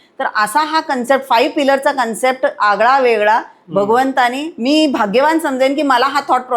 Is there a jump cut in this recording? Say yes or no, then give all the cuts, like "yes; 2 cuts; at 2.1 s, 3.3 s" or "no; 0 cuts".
yes; 1 cut; at 4.5 s